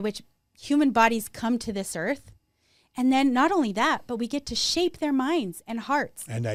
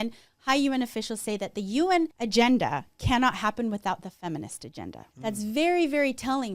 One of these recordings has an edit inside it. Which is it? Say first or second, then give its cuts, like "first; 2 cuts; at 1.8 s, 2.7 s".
second; 2 cuts; at 2.2 s, 5.0 s